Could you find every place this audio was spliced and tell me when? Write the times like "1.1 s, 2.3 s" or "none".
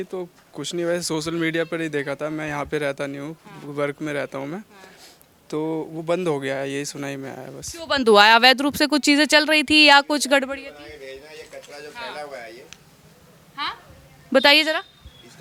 none